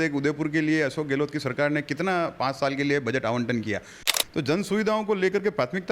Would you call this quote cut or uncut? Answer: cut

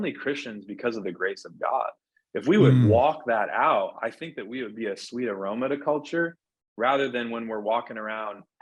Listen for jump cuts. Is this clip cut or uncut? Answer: uncut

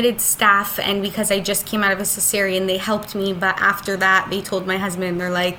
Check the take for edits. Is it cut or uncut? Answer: uncut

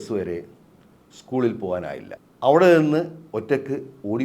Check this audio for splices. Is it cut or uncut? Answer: cut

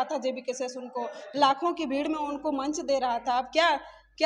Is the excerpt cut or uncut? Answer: uncut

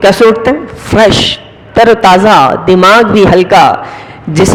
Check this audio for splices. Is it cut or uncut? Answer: uncut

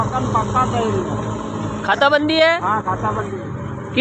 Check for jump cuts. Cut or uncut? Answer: uncut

